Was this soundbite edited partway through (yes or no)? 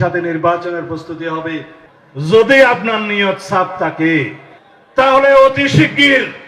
yes